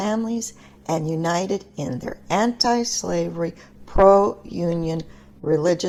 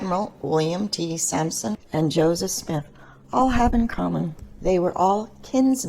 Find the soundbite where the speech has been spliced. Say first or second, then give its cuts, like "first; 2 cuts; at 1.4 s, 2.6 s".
second; 1 cut; at 4.4 s